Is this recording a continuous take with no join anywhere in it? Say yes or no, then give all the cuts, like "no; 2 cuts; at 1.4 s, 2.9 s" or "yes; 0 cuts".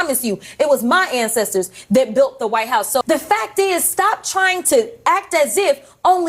no; 1 cut; at 3.0 s